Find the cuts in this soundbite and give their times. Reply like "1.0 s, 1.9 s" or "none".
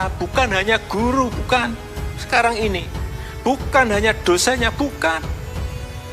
5.2 s